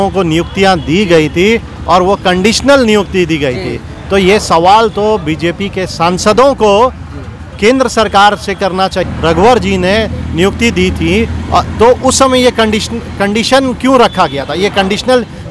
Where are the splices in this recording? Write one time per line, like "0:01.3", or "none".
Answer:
0:09.0